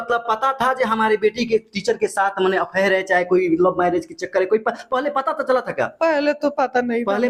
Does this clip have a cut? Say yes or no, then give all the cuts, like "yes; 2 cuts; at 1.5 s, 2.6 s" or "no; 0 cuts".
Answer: no; 0 cuts